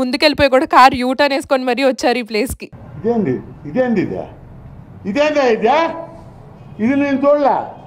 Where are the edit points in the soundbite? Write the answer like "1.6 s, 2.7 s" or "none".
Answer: none